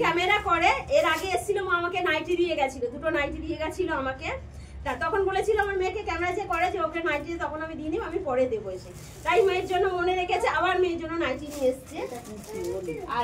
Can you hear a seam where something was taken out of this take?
no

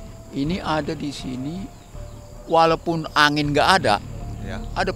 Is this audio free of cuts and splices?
yes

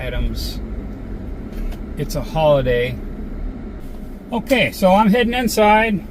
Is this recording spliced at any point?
yes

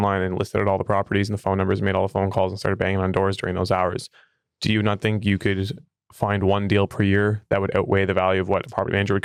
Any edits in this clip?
no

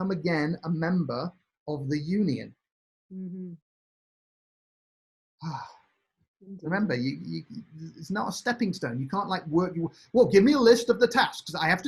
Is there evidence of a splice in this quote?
no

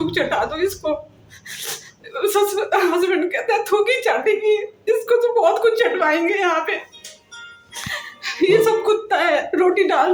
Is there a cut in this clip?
no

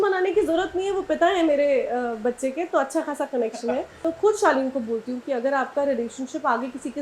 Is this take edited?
yes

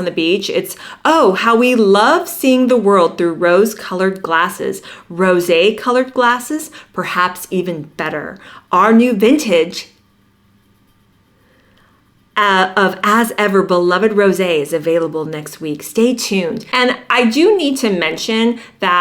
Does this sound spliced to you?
yes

